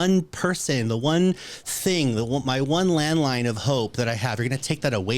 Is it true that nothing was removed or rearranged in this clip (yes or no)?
yes